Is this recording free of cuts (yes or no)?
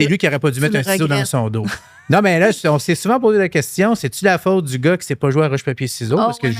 yes